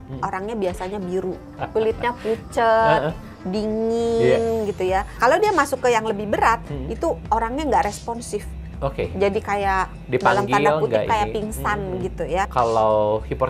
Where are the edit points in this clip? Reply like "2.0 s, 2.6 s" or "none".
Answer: 1.5 s, 5.1 s, 12.5 s